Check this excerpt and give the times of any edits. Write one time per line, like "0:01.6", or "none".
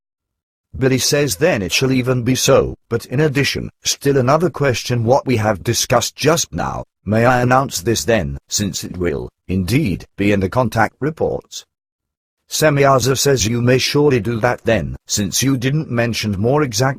0:12.8